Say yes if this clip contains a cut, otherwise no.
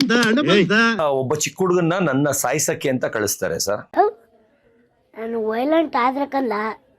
yes